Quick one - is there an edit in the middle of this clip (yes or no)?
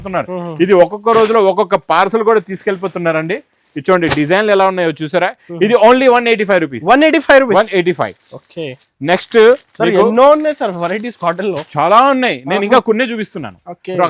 no